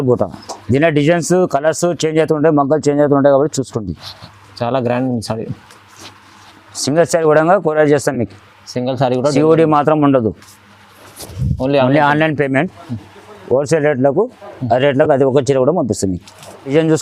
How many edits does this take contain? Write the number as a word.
zero